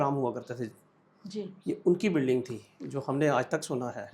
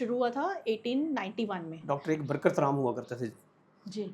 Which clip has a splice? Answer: second; 1 cut; at 1.7 s

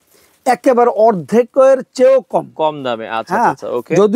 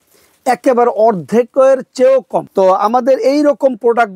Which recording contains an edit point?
second; 1 cut; at 2.4 s

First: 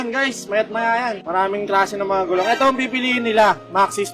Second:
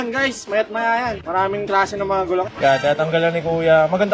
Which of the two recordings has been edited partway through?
second; 1 cut; at 2.4 s

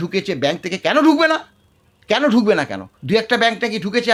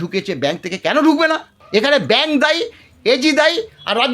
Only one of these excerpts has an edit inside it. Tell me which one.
second; 1 cut; at 1.5 s

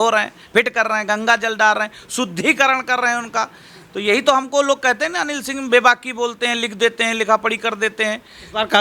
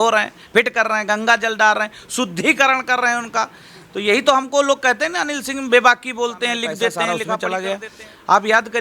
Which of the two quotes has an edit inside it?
second; 1 cut; at 7.2 s

